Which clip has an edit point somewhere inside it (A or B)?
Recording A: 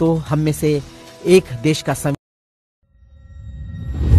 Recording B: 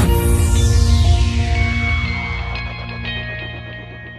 A